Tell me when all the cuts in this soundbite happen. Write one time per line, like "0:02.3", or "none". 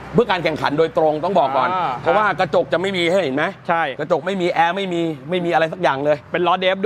none